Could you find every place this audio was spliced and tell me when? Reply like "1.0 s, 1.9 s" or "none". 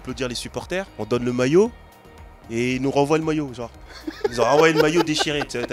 0.9 s